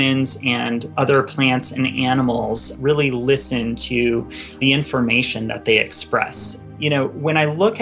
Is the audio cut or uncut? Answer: cut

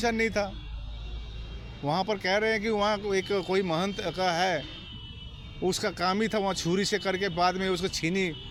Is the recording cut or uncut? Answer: uncut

